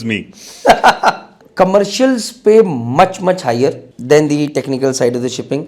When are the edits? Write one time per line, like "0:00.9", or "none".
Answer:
0:01.4
0:03.9